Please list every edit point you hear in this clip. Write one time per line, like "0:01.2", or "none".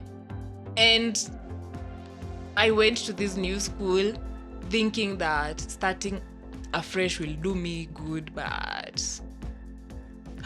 none

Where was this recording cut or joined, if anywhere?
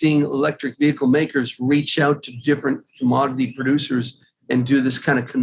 none

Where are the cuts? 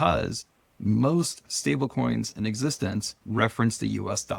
0:03.2

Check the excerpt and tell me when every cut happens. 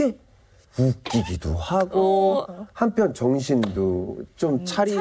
none

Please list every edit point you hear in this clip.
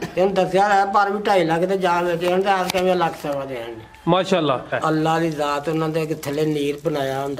0:04.8

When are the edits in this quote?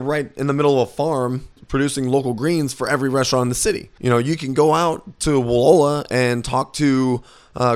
0:01.6
0:03.9

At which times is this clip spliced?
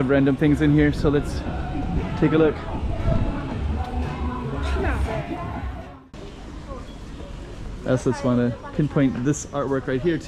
0:05.8

